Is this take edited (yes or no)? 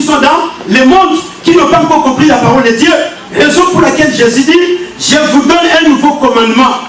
no